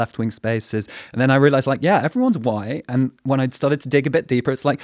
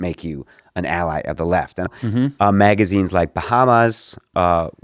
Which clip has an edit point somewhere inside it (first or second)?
second